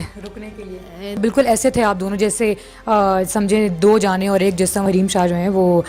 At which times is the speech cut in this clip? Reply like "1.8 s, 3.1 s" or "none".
1.2 s, 4.8 s

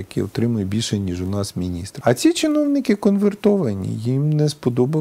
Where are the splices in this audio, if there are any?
1.8 s

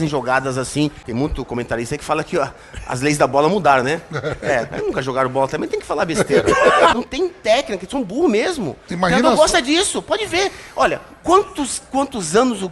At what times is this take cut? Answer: 1.0 s, 6.9 s

